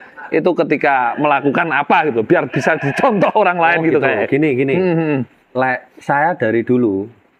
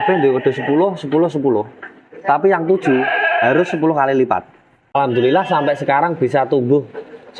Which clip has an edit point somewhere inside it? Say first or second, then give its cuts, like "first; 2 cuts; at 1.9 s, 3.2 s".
second; 1 cut; at 5.0 s